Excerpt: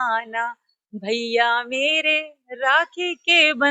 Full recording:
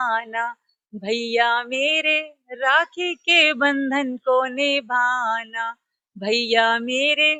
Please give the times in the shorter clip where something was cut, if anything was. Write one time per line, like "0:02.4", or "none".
none